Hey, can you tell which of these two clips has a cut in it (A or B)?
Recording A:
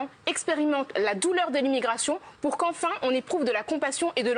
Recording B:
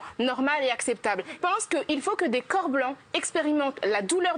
B